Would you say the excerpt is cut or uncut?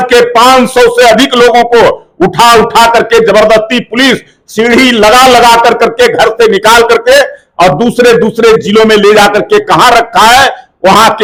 uncut